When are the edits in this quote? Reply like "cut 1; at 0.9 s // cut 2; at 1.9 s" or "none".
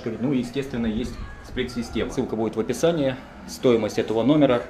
cut 1; at 2.1 s